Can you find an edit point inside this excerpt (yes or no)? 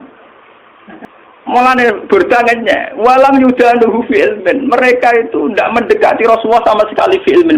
yes